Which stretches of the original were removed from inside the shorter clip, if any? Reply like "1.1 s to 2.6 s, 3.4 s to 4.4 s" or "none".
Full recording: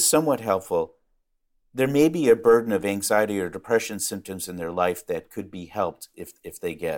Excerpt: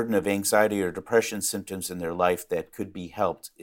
none